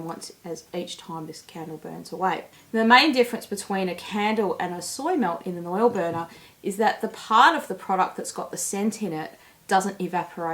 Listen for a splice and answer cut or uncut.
uncut